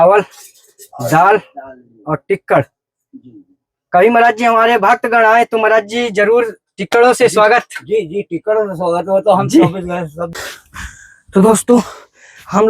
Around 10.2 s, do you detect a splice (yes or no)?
yes